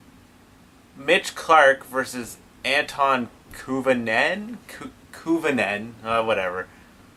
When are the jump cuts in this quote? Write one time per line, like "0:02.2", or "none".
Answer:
none

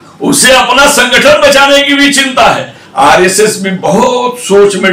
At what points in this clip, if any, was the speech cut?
0:02.8

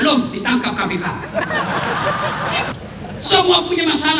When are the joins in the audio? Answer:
0:02.7

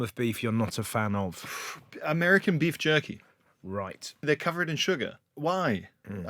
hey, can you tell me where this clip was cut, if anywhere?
0:04.2
0:05.2

